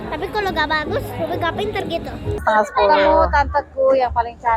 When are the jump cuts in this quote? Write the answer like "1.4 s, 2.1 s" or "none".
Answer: 2.4 s

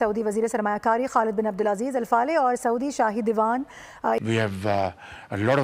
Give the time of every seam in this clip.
4.2 s

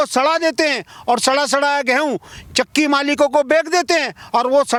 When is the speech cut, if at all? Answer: none

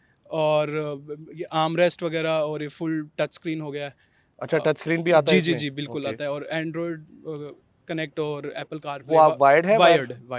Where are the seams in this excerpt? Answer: none

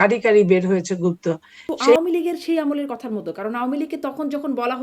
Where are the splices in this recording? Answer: 2.0 s

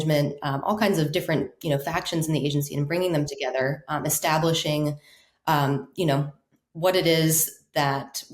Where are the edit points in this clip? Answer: none

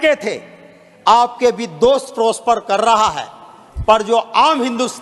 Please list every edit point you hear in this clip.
none

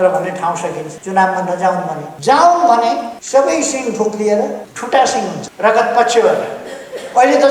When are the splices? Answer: 0.9 s, 2.1 s, 3.1 s, 4.7 s, 5.5 s

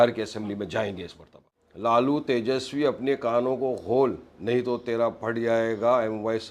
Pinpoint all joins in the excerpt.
1.4 s

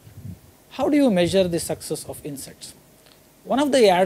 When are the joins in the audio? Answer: 1.4 s

